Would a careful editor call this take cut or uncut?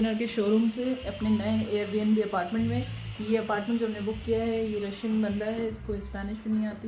uncut